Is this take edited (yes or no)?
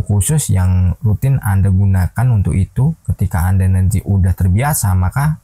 no